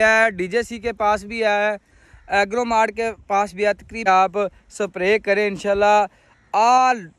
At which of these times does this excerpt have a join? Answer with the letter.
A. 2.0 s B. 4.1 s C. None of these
B